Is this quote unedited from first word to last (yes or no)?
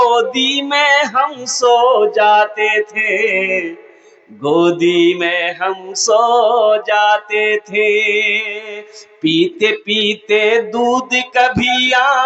yes